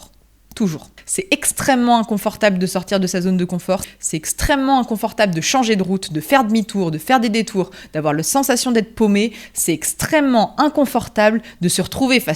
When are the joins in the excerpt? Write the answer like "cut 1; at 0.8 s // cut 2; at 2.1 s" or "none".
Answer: cut 1; at 1.0 s // cut 2; at 3.8 s

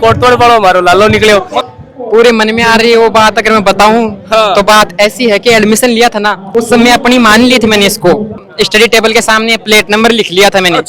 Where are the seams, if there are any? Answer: cut 1; at 1.5 s // cut 2; at 8.5 s

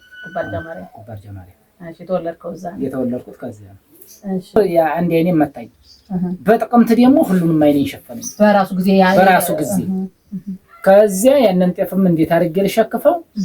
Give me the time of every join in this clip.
cut 1; at 4.6 s

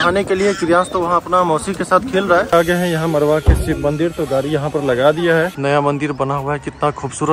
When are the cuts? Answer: cut 1; at 2.5 s // cut 2; at 5.5 s

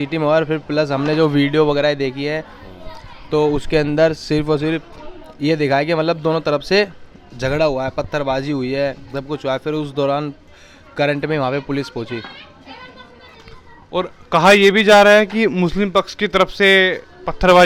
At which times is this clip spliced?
none

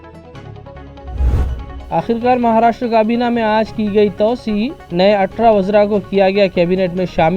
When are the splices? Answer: cut 1; at 1.2 s

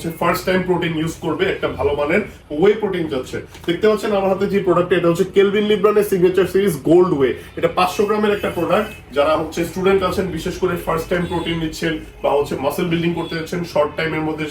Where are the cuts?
none

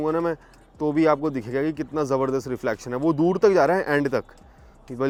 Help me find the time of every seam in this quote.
none

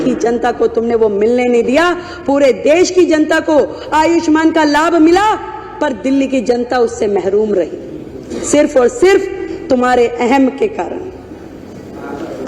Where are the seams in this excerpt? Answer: none

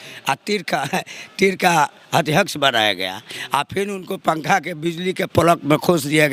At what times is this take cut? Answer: none

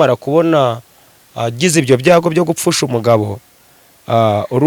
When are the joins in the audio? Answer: none

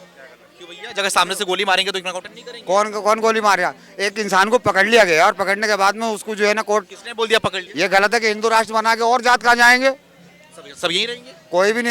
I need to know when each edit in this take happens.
cut 1; at 7.6 s

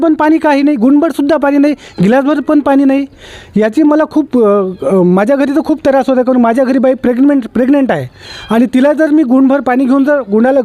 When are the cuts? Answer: none

